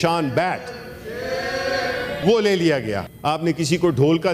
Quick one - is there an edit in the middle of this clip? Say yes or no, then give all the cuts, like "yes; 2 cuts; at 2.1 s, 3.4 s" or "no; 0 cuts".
yes; 2 cuts; at 2.2 s, 3.1 s